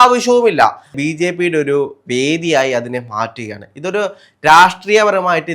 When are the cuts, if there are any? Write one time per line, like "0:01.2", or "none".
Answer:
0:01.0